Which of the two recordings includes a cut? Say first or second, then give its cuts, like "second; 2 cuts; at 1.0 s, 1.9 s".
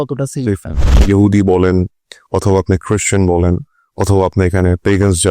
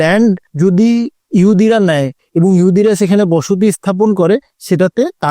first; 1 cut; at 1.0 s